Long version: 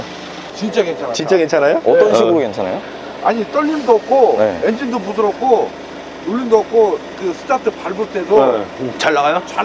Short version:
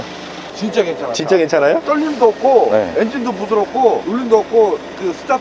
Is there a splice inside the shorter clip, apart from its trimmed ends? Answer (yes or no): yes